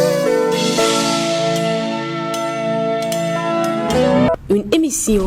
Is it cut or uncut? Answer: uncut